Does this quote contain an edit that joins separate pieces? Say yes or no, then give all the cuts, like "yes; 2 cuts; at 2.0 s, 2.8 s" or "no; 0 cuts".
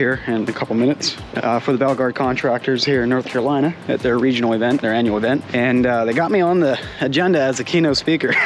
yes; 2 cuts; at 1.2 s, 3.8 s